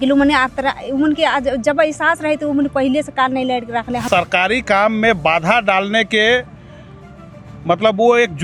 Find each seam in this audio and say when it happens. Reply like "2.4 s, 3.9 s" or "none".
4.0 s